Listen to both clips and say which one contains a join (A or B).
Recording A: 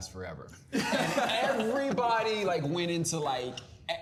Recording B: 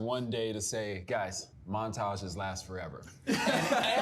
B